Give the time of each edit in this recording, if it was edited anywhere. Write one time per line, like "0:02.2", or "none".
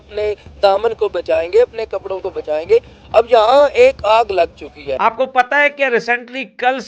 0:04.9